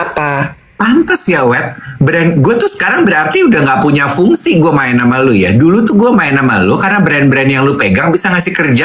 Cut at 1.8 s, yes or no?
no